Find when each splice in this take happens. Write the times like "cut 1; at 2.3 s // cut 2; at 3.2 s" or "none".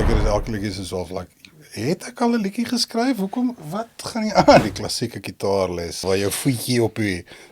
cut 1; at 4.6 s // cut 2; at 6.0 s